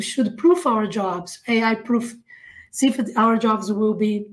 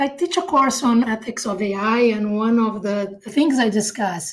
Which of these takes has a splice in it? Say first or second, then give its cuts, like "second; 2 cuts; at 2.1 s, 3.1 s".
second; 2 cuts; at 1.1 s, 3.3 s